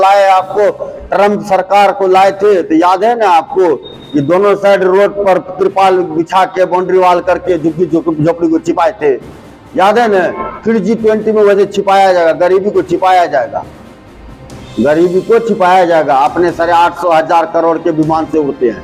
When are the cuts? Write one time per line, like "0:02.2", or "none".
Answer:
0:01.1